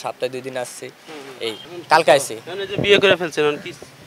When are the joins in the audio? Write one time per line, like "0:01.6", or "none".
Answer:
0:01.6